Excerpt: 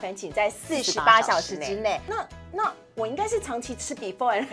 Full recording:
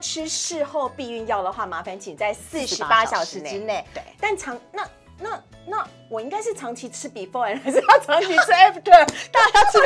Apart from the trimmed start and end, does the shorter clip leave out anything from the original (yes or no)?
yes